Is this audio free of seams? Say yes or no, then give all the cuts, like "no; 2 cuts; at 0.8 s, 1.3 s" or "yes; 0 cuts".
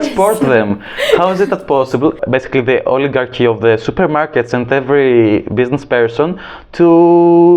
no; 1 cut; at 2.2 s